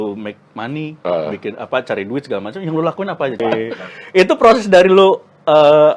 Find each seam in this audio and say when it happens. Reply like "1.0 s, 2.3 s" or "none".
3.4 s